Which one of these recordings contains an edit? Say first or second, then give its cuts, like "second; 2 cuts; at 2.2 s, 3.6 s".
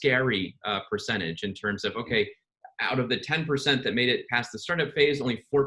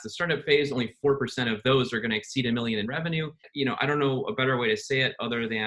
second; 1 cut; at 3.4 s